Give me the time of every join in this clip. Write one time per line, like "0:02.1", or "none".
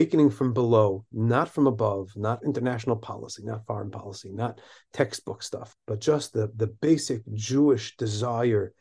0:05.6